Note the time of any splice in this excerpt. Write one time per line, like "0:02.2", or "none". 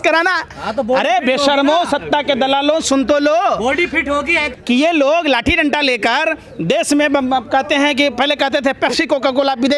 0:04.5